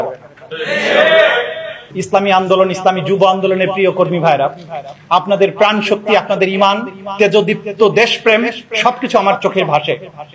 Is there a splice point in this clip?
yes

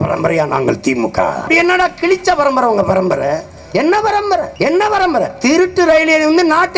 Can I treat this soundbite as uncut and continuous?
no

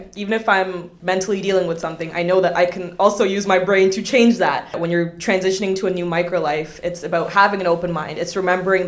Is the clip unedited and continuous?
no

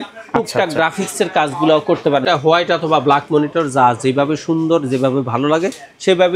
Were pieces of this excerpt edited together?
yes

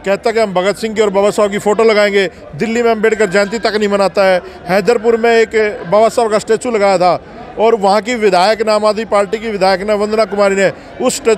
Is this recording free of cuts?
yes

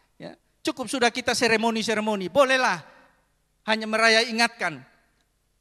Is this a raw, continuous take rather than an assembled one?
yes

